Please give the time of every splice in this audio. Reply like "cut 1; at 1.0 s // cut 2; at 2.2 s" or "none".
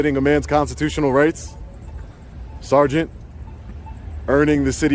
none